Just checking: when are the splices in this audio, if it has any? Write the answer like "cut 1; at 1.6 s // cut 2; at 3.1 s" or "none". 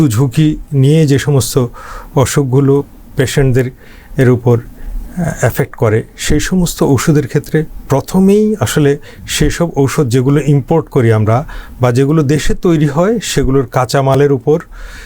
none

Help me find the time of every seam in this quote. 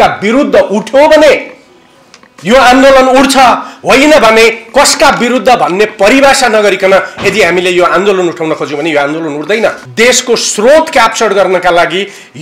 cut 1; at 9.8 s

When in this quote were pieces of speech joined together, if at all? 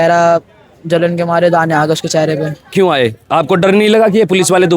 cut 1; at 2.7 s

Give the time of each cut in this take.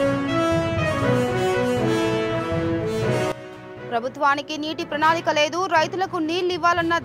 cut 1; at 3.3 s

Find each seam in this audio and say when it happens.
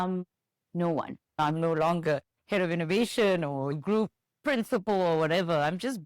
cut 1; at 1.3 s

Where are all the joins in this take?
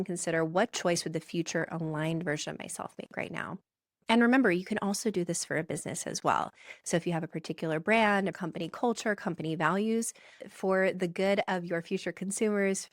none

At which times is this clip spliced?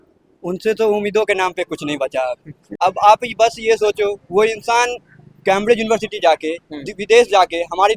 cut 1; at 2.7 s

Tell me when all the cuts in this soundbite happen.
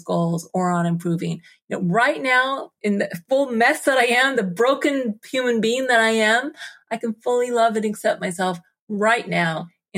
cut 1; at 2.8 s

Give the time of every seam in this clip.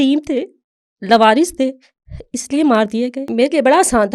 cut 1; at 3.2 s

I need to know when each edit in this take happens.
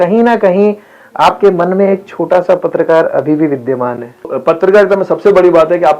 cut 1; at 4.3 s

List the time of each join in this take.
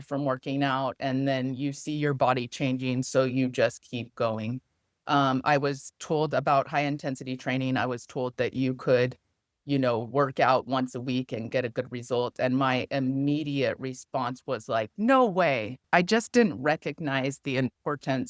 cut 1; at 15.8 s

